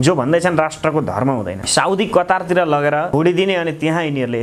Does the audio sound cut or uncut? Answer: cut